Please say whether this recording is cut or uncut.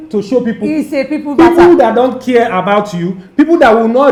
uncut